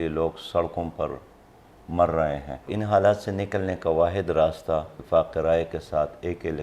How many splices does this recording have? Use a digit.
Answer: 2